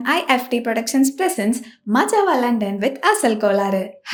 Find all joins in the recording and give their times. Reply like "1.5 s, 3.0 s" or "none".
none